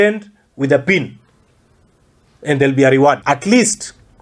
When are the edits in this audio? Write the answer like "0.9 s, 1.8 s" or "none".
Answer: 3.2 s